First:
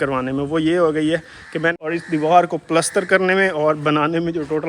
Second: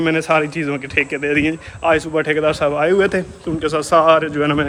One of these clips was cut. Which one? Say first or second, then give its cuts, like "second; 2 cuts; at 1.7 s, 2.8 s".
first; 1 cut; at 1.7 s